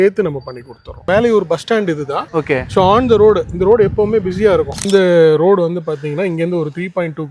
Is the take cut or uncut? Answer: cut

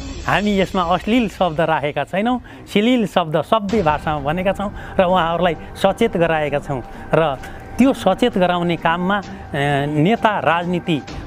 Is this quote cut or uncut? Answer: uncut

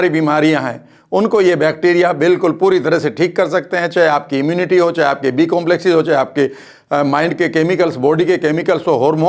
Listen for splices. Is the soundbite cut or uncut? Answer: uncut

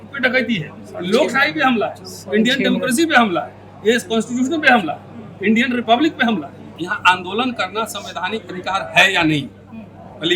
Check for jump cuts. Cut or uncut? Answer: cut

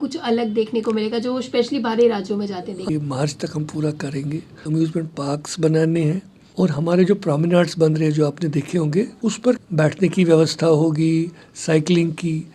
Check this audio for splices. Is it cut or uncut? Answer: cut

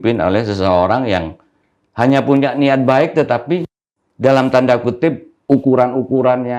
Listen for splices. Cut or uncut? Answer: cut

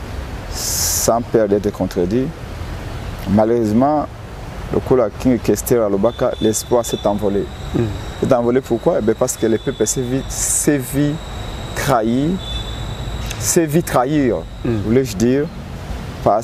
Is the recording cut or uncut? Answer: uncut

